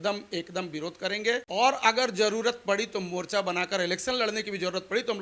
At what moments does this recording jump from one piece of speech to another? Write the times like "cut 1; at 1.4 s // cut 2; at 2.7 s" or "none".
cut 1; at 1.5 s